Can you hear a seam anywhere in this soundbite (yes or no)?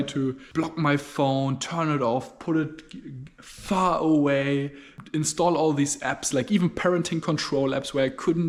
no